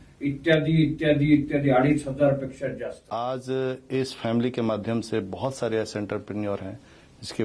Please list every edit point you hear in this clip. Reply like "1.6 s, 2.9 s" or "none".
3.0 s